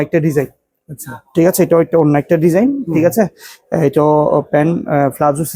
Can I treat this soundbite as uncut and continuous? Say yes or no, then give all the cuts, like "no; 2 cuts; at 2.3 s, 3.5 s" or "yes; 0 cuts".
yes; 0 cuts